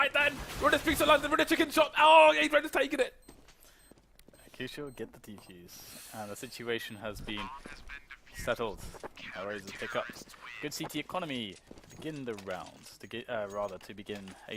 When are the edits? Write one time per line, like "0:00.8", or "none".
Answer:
0:01.5